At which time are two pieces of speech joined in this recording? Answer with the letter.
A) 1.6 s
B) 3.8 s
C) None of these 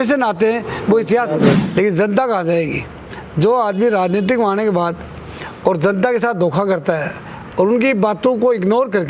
A